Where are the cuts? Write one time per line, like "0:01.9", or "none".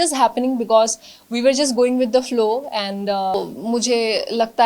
0:03.3